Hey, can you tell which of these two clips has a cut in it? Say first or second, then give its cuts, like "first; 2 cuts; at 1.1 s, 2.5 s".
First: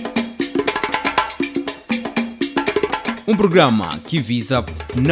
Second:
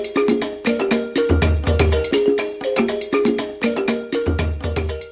second; 1 cut; at 1.9 s